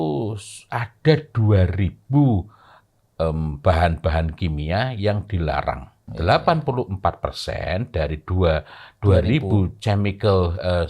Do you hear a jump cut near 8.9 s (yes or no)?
no